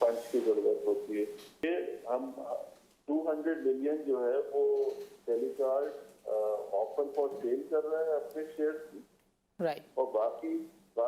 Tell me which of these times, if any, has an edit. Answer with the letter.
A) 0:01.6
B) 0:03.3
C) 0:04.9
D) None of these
A